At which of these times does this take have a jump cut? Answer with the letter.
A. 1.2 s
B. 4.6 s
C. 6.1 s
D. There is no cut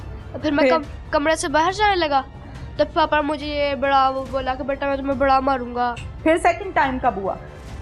C